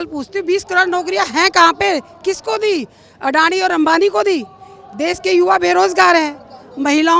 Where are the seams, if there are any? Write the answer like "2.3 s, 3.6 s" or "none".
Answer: none